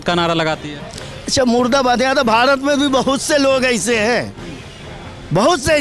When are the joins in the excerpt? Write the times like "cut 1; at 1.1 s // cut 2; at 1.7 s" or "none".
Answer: none